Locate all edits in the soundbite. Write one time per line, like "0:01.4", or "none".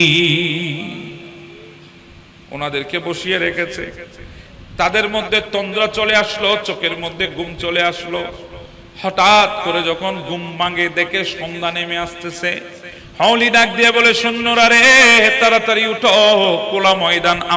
none